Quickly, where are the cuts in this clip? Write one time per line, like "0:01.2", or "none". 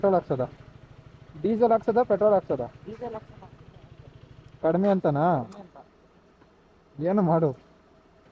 none